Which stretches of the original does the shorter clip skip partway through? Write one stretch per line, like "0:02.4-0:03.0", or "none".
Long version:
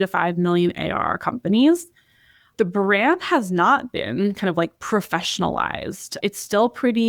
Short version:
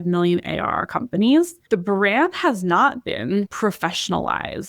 0:01.9-0:02.4
0:04.4-0:04.8